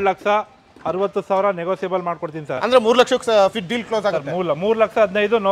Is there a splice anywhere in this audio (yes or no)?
yes